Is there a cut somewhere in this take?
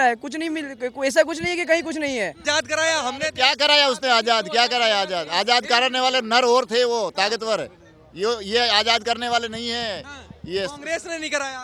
yes; 1 cut; at 2.4 s

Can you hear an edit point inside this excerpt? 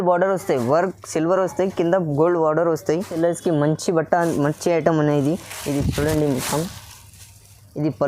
yes; 1 cut; at 3.1 s

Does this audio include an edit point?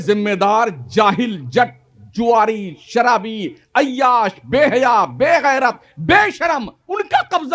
no; 0 cuts

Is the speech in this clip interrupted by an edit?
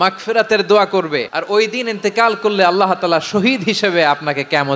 yes; 1 cut; at 1.3 s

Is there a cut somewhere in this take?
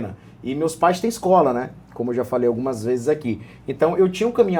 no; 0 cuts

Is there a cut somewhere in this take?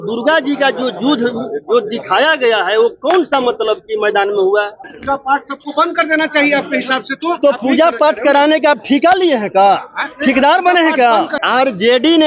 yes; 2 cuts; at 4.9 s, 11.4 s

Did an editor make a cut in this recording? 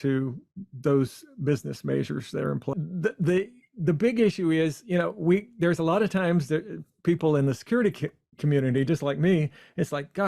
yes; 1 cut; at 2.7 s

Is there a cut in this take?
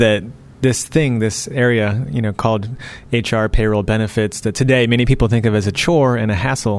no; 0 cuts

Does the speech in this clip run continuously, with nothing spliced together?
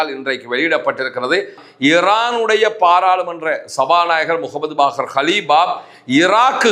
no; 1 cut; at 1.5 s

